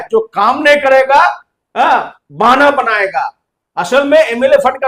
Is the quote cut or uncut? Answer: uncut